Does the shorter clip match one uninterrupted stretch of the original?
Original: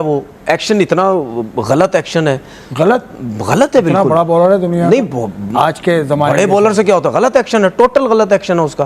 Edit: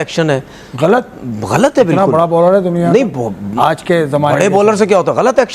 yes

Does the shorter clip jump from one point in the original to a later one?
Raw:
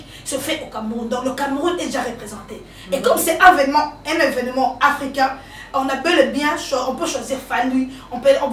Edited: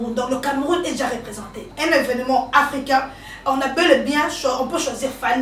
yes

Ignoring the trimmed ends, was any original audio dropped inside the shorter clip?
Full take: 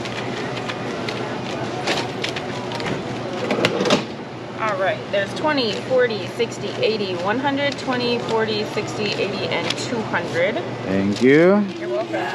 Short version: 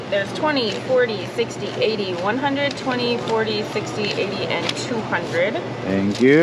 no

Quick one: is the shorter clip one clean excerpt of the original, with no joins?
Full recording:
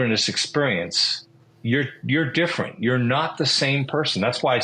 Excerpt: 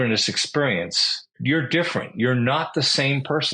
no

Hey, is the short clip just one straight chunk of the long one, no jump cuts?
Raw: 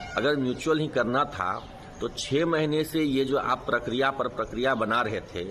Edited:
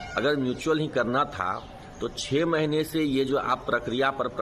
yes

